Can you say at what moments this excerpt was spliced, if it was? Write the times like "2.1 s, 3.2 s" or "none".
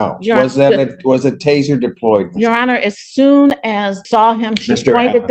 4.0 s